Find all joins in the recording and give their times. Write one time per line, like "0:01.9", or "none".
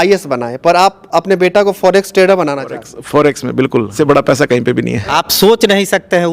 0:03.9
0:05.1